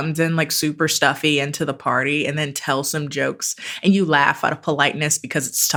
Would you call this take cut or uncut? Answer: uncut